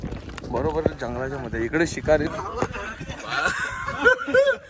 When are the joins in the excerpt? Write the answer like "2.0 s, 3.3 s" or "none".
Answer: 2.3 s